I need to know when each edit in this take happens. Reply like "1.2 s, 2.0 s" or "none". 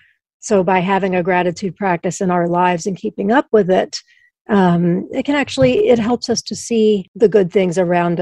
7.1 s